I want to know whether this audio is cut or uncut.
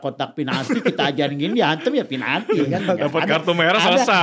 uncut